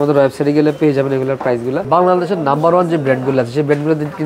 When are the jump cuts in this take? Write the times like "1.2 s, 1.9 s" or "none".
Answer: 1.9 s